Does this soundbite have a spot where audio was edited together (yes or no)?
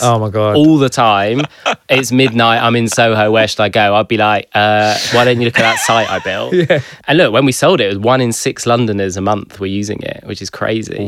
no